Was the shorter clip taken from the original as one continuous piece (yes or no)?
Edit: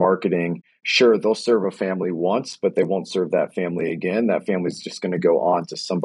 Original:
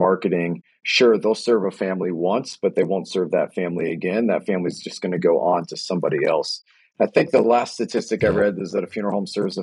yes